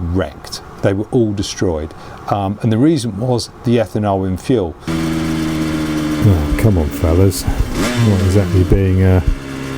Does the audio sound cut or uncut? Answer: cut